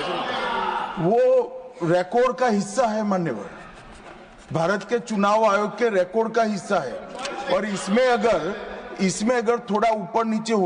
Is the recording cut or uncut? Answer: uncut